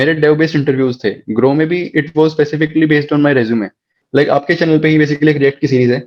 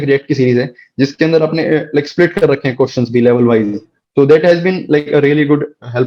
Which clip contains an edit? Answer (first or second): first